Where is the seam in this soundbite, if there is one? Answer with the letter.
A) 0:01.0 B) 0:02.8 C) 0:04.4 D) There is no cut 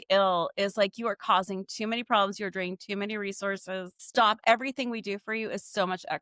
C